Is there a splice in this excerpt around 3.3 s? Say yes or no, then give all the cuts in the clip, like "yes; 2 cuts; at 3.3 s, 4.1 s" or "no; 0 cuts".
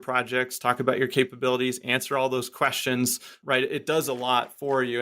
yes; 1 cut; at 3.3 s